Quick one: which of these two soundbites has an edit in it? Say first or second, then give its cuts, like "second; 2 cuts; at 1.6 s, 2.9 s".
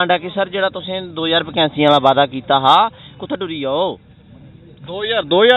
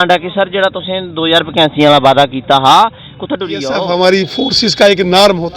second; 1 cut; at 3.7 s